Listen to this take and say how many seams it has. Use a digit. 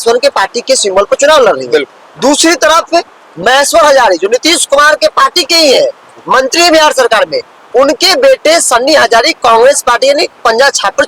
0